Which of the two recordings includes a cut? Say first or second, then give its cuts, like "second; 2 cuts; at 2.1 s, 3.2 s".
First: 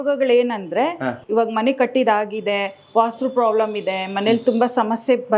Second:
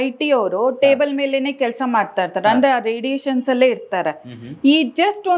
first; 1 cut; at 1.2 s